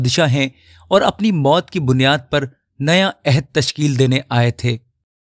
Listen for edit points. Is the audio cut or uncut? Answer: uncut